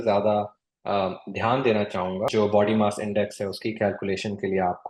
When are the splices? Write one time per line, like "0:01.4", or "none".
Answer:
0:02.3